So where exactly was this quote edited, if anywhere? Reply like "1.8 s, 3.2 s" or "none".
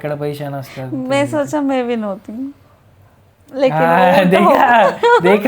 none